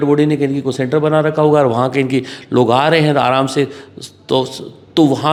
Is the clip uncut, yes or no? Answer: yes